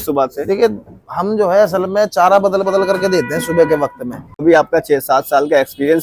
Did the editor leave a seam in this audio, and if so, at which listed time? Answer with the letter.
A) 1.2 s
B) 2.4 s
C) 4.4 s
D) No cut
C